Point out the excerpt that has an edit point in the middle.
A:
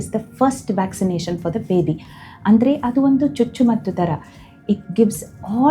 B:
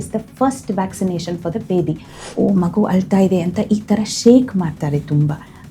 B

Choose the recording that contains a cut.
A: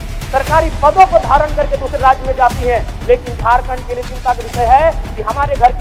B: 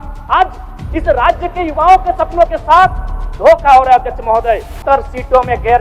B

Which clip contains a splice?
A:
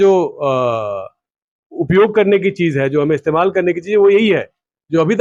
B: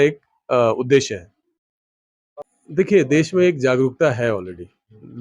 B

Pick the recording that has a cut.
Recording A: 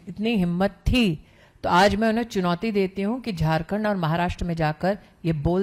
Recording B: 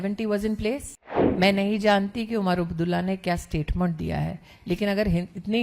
B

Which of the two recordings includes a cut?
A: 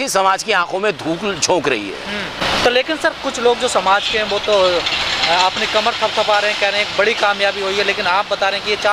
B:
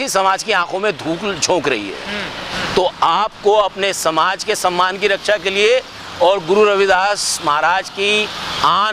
B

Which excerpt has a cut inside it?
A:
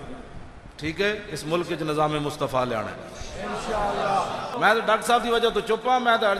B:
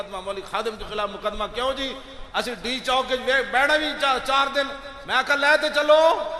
A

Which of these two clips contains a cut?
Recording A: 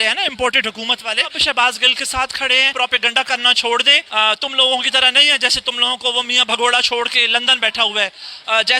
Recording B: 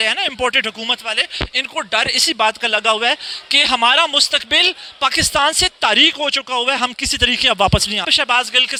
A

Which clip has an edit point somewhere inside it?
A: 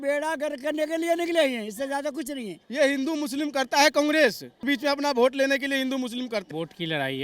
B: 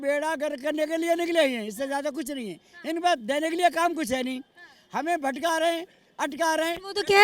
A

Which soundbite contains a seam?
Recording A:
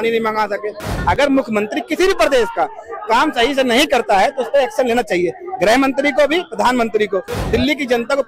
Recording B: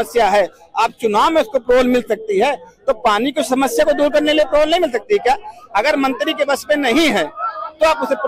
A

